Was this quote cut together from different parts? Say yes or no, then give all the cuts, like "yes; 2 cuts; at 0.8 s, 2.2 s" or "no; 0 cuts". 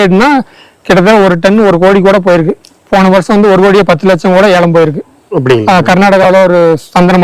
no; 0 cuts